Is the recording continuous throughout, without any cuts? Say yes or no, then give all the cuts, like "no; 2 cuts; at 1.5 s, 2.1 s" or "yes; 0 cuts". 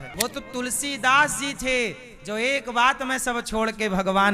yes; 0 cuts